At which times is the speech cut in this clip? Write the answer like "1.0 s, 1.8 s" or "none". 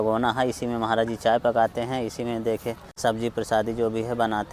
2.9 s